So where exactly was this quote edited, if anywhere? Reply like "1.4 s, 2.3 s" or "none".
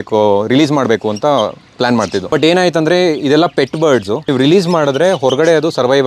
2.3 s, 4.3 s